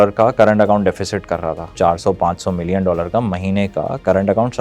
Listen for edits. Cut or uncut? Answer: cut